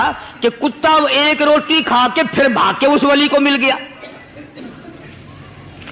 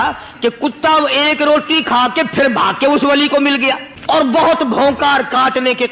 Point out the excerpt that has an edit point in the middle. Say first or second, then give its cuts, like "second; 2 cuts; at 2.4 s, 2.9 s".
second; 1 cut; at 4.2 s